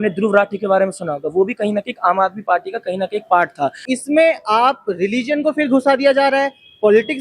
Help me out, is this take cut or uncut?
cut